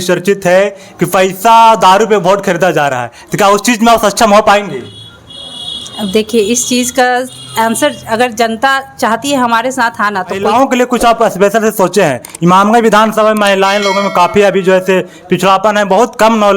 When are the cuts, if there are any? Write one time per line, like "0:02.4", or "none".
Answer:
0:10.4